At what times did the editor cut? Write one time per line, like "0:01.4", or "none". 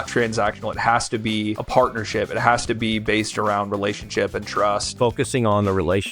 0:04.9